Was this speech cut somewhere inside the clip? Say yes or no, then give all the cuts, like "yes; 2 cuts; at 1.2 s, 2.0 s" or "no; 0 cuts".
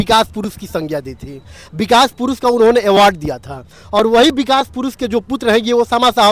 no; 0 cuts